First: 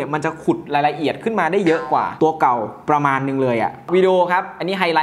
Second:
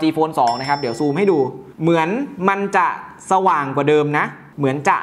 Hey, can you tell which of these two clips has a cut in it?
first; 1 cut; at 3.9 s

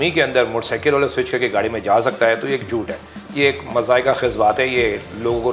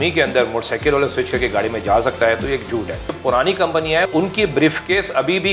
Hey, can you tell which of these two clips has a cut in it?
second; 2 cuts; at 3.1 s, 4.1 s

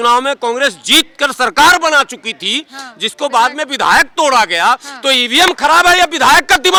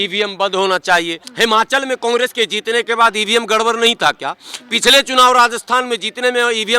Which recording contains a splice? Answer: second; 1 cut; at 1.2 s

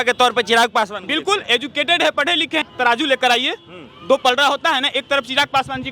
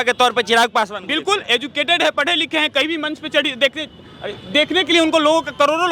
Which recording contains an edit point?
first; 1 cut; at 2.7 s

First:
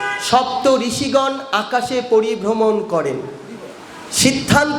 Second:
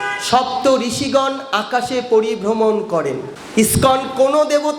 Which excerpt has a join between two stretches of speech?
second; 1 cut; at 3.3 s

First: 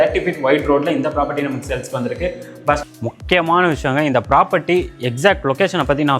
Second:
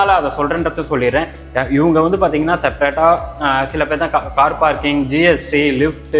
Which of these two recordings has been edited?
first; 1 cut; at 2.8 s

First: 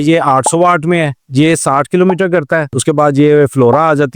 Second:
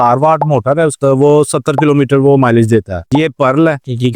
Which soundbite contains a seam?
second; 2 cuts; at 1.0 s, 3.0 s

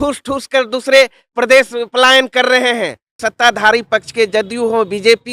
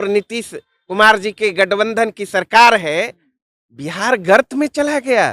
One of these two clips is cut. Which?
first; 1 cut; at 3.2 s

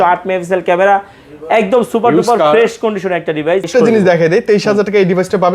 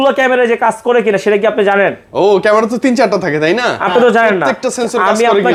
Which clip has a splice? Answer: first; 1 cut; at 3.7 s

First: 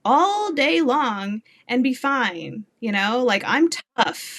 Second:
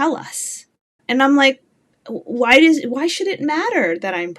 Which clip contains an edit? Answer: second; 1 cut; at 1.0 s

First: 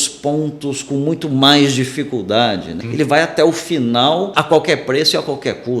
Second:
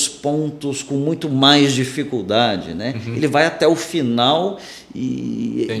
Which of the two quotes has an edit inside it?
first; 2 cuts; at 2.8 s, 4.3 s

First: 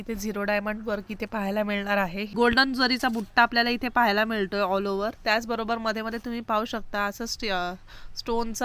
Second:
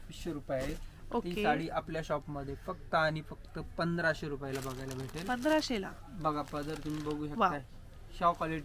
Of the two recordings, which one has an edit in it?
first; 1 cut; at 2.3 s

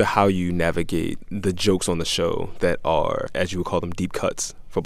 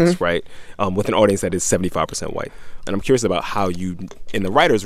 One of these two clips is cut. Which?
second; 1 cut; at 2.8 s

